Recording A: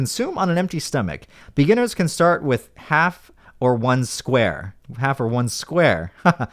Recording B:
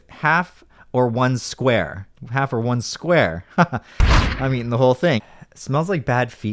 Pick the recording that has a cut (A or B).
B